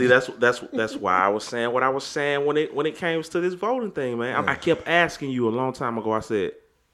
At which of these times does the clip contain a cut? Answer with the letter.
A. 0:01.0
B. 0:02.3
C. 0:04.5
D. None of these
C